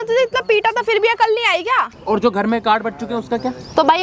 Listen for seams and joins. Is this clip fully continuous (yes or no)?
no